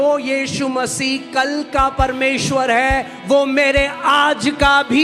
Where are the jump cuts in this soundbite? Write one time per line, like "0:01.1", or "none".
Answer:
none